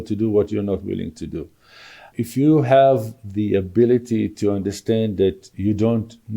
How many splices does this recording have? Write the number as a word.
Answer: one